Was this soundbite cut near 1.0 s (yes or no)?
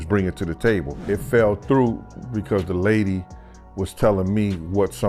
yes